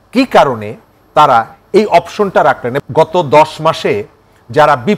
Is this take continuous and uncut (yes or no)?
no